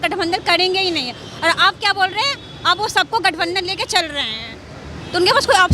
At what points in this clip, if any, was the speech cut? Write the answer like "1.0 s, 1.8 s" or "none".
none